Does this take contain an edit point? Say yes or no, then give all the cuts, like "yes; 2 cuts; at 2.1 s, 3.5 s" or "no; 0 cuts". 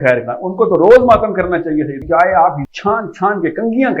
yes; 2 cuts; at 2.0 s, 2.7 s